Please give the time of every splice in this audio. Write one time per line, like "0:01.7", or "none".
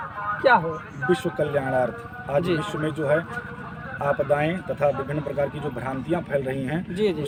none